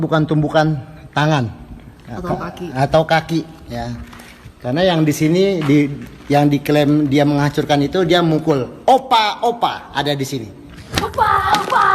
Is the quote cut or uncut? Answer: cut